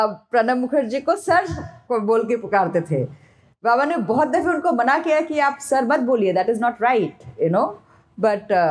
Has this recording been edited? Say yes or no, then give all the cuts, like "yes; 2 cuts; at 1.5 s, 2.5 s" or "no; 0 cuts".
no; 0 cuts